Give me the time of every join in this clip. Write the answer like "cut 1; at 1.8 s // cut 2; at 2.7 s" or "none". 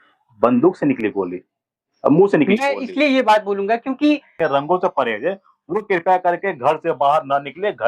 cut 1; at 4.3 s